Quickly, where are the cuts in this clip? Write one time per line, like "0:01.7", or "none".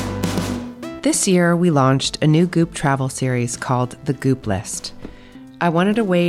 0:00.9